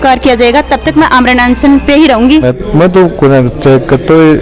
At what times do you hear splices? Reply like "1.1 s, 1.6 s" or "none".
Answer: 2.5 s